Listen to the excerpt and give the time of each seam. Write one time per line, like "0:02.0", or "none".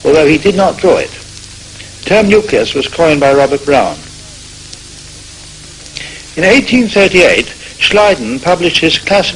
0:08.1